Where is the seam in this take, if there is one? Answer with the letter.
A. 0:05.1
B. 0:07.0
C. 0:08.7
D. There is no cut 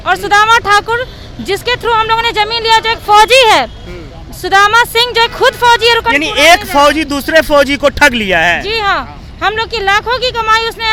D